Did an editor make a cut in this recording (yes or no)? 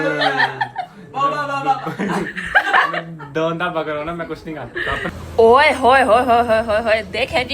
yes